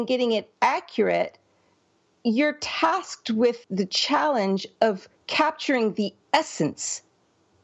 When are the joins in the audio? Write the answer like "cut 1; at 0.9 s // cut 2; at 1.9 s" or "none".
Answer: cut 1; at 3.6 s